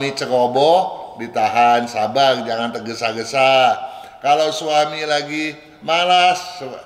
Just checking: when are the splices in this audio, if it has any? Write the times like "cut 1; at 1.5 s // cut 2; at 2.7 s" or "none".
none